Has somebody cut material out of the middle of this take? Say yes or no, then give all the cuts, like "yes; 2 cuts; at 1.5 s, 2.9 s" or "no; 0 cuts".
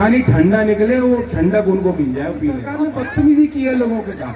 yes; 1 cut; at 2.7 s